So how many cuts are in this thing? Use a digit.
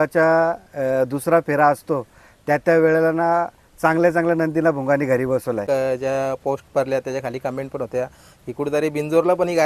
1